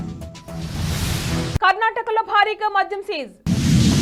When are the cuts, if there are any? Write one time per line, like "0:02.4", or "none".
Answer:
none